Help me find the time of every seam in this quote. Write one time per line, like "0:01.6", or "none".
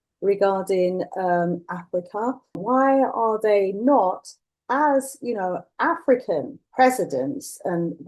0:02.6
0:06.6